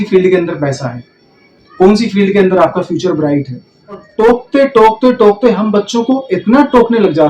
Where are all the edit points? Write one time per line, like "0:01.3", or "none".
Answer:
0:04.1